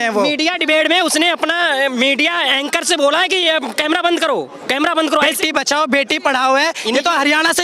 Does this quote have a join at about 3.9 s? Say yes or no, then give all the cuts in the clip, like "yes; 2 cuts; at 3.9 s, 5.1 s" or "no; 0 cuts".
no; 1 cut; at 5.4 s